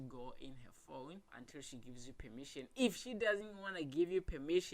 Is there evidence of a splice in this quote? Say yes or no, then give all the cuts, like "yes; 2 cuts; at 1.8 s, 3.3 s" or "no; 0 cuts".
yes; 1 cut; at 1.3 s